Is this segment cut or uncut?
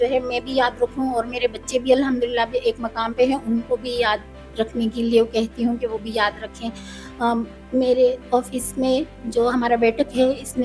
uncut